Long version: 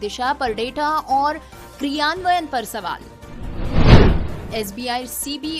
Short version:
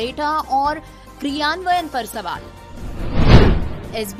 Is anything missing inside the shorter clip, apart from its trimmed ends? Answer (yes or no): no